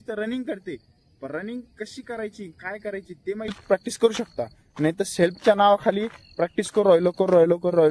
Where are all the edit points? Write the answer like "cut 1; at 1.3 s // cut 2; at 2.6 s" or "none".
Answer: cut 1; at 3.6 s